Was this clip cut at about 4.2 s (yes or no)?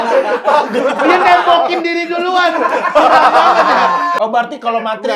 yes